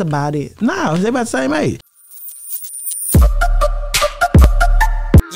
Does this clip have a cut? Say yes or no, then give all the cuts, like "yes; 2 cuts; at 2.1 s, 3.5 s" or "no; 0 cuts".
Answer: yes; 1 cut; at 1.9 s